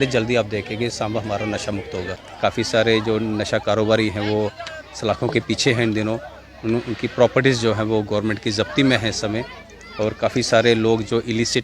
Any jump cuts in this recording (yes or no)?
yes